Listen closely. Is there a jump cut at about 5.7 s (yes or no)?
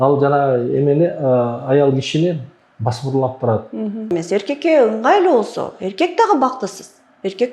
no